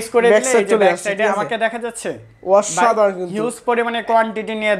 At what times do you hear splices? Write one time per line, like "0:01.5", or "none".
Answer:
none